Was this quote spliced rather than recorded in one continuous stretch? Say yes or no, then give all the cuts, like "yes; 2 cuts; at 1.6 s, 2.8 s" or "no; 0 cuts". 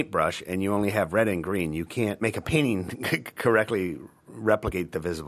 no; 0 cuts